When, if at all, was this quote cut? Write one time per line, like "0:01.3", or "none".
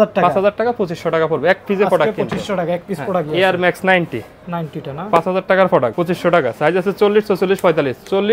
none